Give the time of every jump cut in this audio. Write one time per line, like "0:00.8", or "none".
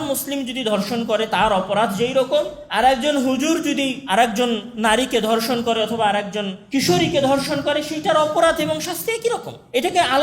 0:02.6
0:04.0

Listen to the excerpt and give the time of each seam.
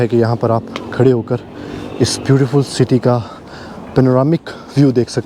none

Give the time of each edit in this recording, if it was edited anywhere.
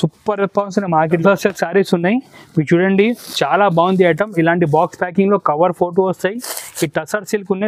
0:01.2

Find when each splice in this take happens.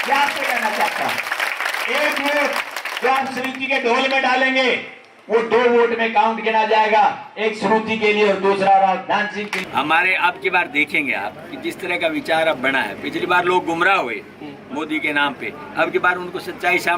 0:09.6

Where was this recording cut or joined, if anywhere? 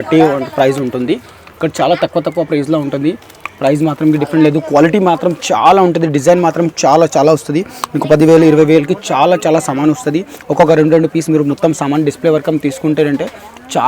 none

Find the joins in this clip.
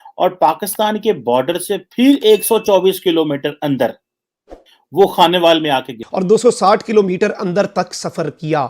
0:06.0

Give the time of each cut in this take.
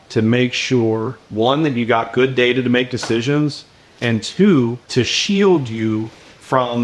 0:01.2
0:04.8

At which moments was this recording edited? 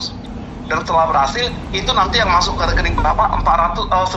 none

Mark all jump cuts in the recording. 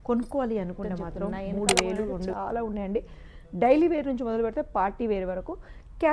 0:02.3

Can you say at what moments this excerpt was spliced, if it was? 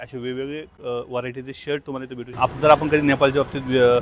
0:02.3

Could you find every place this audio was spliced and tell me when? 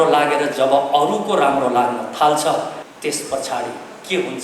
0:02.9

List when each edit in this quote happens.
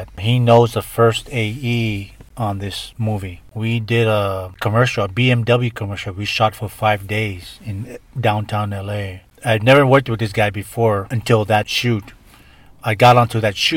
0:03.5

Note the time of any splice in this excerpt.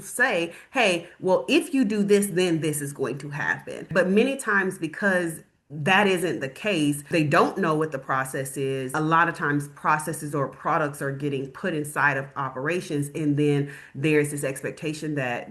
0:03.9
0:08.9

